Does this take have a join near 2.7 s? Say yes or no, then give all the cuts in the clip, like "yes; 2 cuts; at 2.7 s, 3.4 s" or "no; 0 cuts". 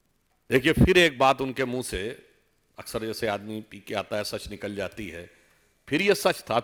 no; 0 cuts